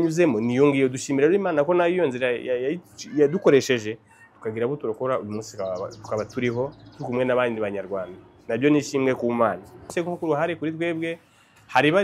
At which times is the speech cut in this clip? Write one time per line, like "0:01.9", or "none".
0:09.9

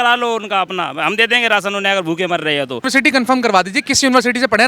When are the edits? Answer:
0:02.8

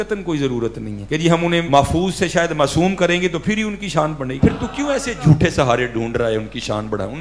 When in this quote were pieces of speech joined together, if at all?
0:01.4
0:04.3

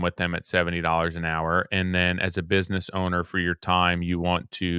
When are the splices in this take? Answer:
none

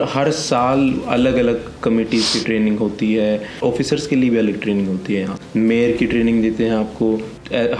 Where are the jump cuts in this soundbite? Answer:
0:03.6
0:05.4

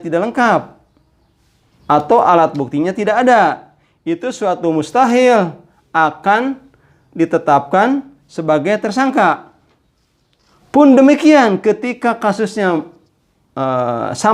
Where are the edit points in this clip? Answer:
none

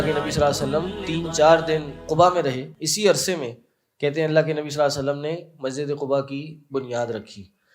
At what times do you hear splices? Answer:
0:01.0
0:02.0
0:02.7

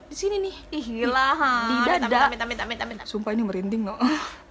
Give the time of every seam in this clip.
0:03.0

